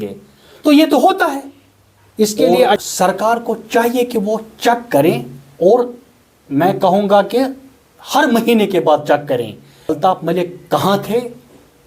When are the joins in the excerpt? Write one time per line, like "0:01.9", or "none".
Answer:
0:02.8
0:10.0

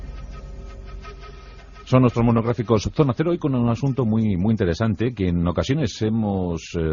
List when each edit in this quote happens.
none

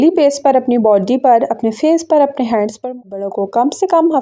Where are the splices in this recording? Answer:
0:03.1

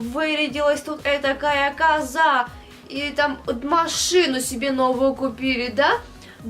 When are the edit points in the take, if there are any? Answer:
none

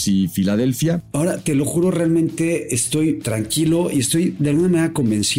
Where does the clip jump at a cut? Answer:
0:01.1
0:03.3
0:04.4

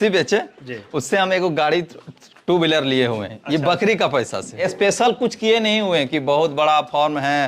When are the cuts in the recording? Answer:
0:04.5

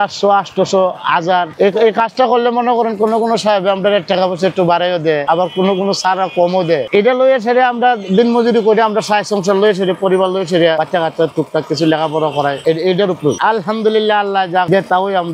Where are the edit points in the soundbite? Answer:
0:01.5
0:06.8
0:10.8

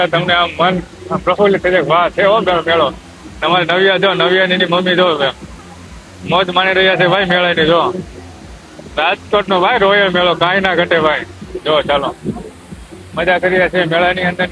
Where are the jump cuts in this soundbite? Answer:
none

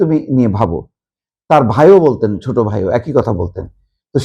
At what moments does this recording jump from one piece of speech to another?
none

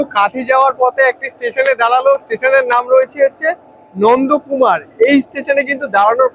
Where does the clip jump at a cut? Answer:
none

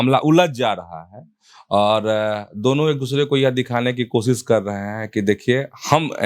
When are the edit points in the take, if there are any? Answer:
none

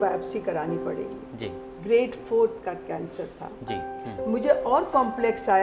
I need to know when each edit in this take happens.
0:04.1

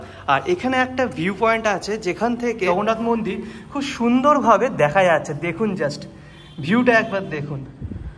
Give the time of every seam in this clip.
none

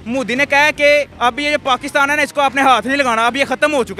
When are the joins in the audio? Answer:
0:01.1

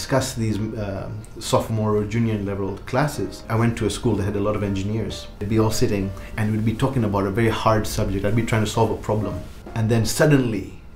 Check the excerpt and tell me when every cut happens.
none

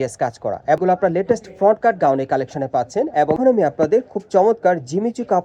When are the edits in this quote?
0:00.8
0:03.4

